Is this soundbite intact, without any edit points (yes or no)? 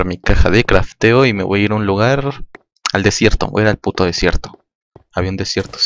no